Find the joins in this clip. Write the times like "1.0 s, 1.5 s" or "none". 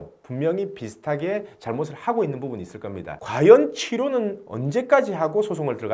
3.2 s